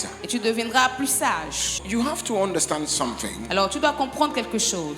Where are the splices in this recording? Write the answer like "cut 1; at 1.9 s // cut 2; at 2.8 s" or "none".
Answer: cut 1; at 1.7 s